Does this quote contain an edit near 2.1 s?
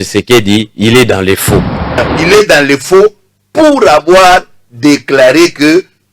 yes; 1 cut; at 2.1 s

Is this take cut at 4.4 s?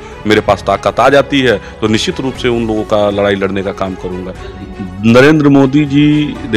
yes; 1 cut; at 4.4 s

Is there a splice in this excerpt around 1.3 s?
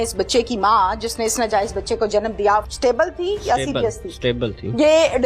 no; 1 cut; at 2.7 s

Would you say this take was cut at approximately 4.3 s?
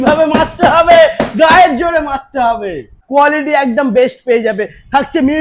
no; 1 cut; at 3.0 s

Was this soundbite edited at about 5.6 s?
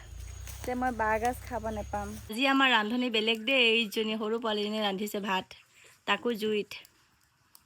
no; 1 cut; at 2.3 s

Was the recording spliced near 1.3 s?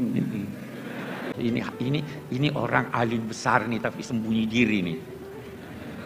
yes; 1 cut; at 1.3 s

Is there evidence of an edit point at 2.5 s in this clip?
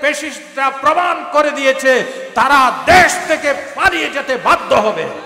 no; 0 cuts

